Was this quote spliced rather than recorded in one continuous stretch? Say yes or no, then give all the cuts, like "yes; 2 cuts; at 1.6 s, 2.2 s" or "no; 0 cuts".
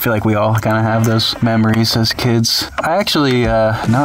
yes; 2 cuts; at 1.3 s, 2.7 s